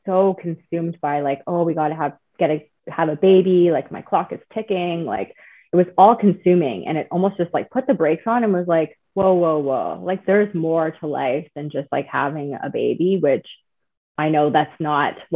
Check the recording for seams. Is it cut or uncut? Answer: uncut